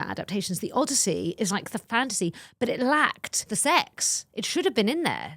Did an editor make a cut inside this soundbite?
yes; 2 cuts; at 1.8 s, 3.4 s

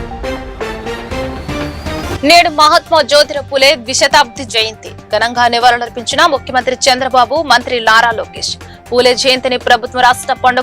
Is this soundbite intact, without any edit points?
no; 1 cut; at 2.0 s

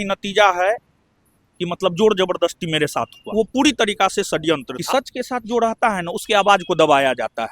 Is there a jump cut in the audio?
yes; 2 cuts; at 3.2 s, 4.7 s

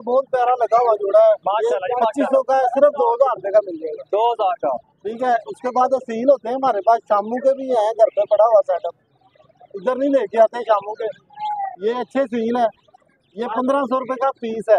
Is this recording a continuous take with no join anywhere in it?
yes; 0 cuts

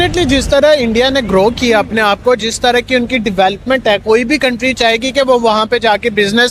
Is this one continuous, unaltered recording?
yes; 0 cuts

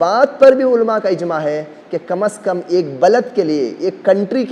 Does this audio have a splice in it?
no; 0 cuts

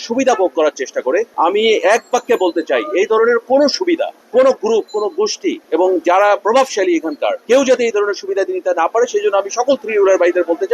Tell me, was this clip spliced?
no; 0 cuts

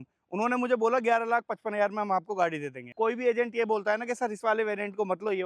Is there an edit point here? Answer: yes; 1 cut; at 2.8 s

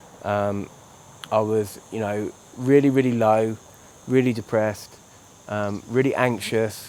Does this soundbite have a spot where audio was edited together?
no; 0 cuts

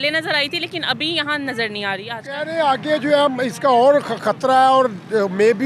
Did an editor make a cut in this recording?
yes; 1 cut; at 2.2 s

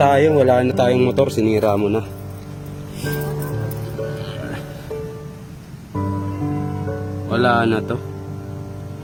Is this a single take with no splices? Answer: yes; 0 cuts

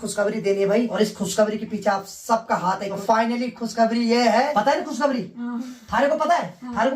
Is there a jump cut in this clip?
yes; 3 cuts; at 0.9 s, 3.0 s, 4.5 s

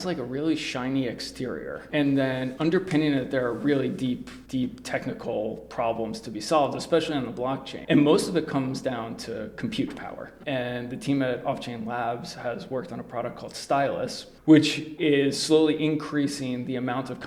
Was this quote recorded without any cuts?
no; 4 cuts; at 4.3 s, 7.7 s, 10.3 s, 14.9 s

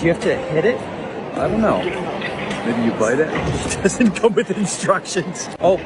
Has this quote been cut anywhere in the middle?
no; 0 cuts

